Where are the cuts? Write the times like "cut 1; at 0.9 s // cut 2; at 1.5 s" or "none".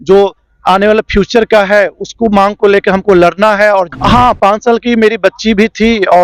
cut 1; at 3.9 s